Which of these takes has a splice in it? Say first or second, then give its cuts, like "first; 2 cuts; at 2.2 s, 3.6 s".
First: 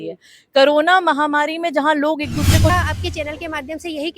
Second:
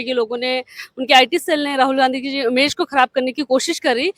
first; 1 cut; at 2.7 s